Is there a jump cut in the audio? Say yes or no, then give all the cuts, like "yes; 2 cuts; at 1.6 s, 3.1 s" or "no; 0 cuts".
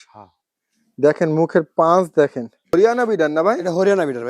yes; 1 cut; at 2.7 s